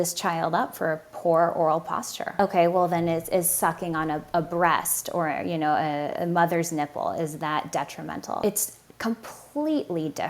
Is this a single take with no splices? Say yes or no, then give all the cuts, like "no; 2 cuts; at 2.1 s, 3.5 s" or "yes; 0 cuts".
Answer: no; 2 cuts; at 2.4 s, 8.4 s